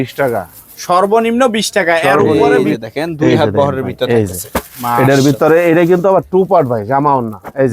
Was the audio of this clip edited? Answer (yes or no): yes